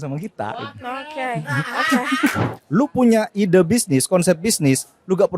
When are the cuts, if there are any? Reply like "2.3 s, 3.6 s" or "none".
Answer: 2.5 s